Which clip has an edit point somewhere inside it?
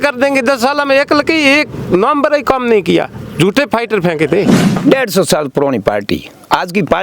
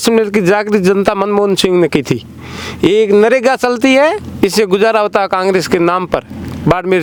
first; 1 cut; at 4.6 s

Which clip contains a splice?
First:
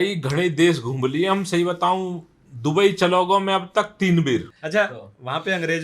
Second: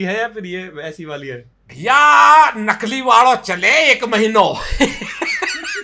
first; 1 cut; at 4.6 s

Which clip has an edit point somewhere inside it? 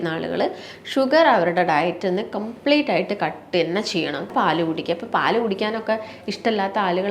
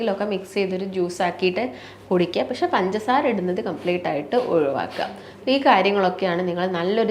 first; 1 cut; at 4.3 s

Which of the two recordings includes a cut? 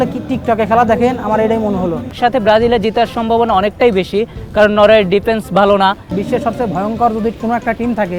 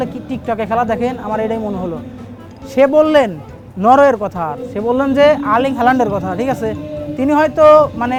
first; 2 cuts; at 2.0 s, 6.1 s

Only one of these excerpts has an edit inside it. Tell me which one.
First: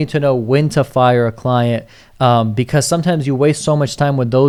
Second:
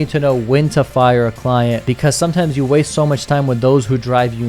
second; 1 cut; at 1.9 s

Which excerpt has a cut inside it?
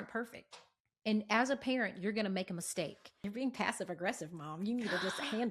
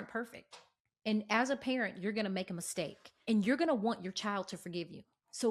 first; 1 cut; at 3.2 s

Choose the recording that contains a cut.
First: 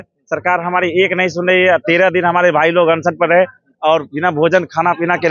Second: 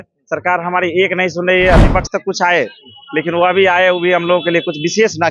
second; 1 cut; at 1.8 s

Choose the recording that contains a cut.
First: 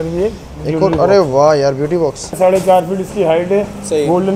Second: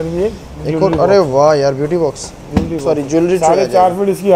first; 1 cut; at 2.3 s

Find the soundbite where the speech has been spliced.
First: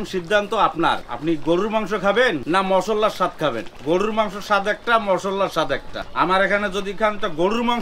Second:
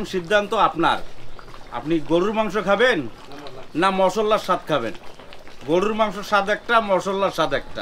first; 4 cuts; at 1.1 s, 2.4 s, 3.7 s, 6.0 s

